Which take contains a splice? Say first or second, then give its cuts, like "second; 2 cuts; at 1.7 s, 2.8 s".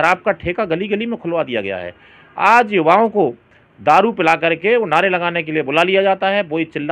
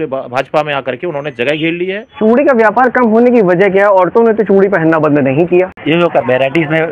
second; 2 cuts; at 2.1 s, 5.8 s